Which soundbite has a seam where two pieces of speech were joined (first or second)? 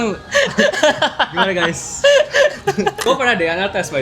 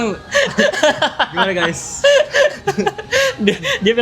first